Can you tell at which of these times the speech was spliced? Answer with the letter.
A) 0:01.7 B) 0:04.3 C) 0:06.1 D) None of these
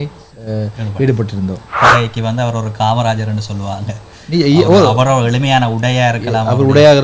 A